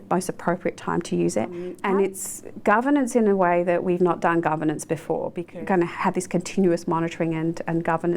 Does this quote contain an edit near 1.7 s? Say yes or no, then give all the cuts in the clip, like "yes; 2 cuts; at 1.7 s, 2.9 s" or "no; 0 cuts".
yes; 2 cuts; at 1.7 s, 5.4 s